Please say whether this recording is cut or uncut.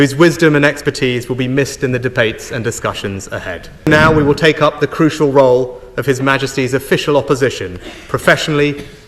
cut